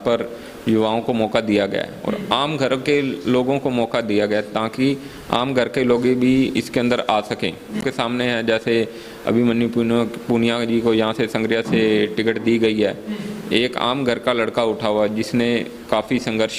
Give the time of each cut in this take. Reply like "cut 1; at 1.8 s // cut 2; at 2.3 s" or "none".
cut 1; at 7.8 s